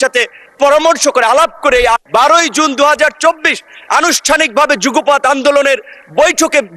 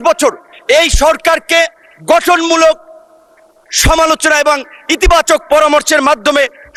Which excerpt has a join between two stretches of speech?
first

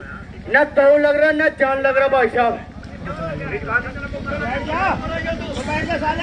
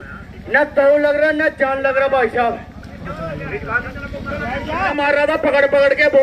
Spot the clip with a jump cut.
second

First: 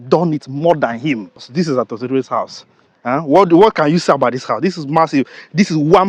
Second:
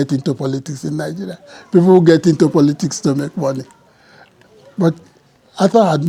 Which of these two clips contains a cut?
first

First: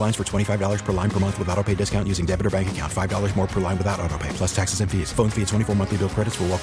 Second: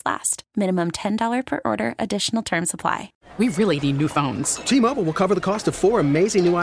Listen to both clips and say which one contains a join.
second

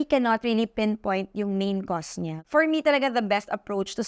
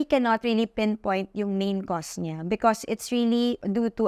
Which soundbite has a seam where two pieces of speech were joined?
first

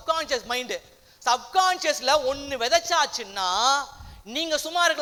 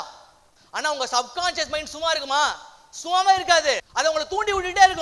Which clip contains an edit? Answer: second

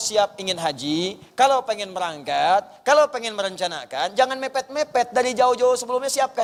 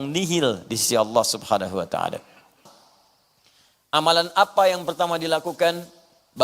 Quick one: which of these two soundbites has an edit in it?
second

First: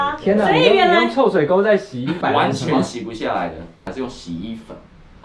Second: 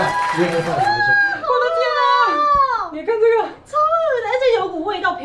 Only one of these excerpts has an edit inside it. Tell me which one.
first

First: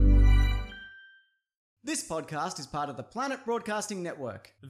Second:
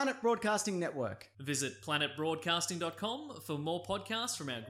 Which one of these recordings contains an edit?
first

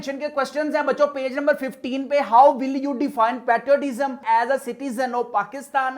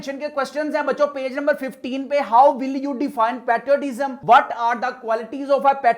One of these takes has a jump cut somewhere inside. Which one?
first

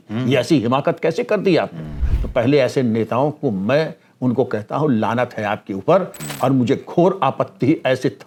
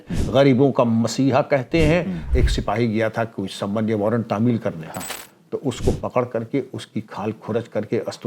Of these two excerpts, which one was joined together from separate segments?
second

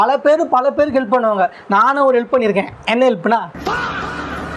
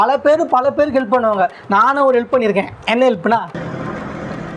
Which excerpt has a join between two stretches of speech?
first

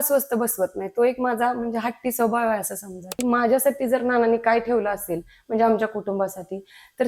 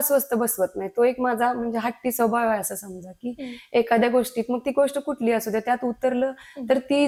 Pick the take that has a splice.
first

